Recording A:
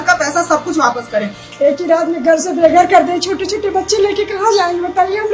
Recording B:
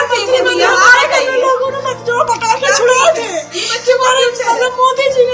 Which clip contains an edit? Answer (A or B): A